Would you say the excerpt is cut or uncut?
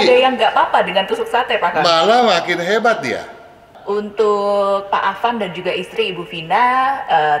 cut